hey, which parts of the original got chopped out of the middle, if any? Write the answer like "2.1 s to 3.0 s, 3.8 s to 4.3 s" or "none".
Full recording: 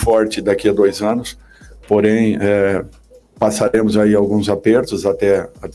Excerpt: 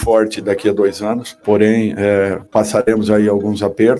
1.3 s to 1.7 s, 2.8 s to 3.3 s